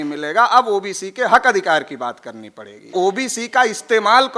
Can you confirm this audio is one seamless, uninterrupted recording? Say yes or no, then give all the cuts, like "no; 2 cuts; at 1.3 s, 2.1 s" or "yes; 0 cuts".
no; 1 cut; at 2.9 s